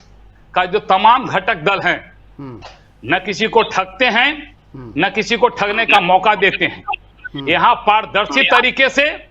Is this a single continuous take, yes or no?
yes